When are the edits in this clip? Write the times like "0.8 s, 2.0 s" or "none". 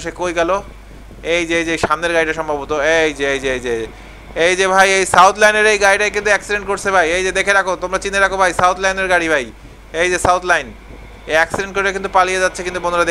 none